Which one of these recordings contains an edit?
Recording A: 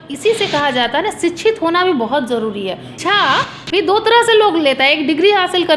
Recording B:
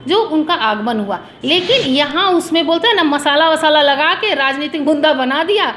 A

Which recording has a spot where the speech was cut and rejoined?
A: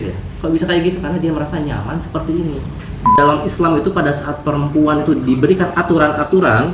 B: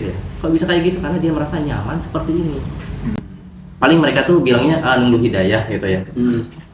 A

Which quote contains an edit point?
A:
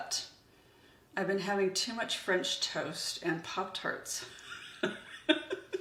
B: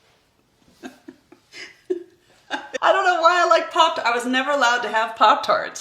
B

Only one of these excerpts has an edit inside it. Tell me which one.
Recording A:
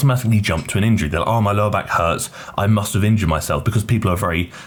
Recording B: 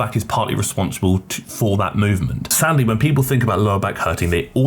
B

